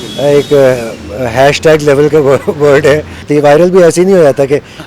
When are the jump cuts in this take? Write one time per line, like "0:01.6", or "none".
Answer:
0:03.3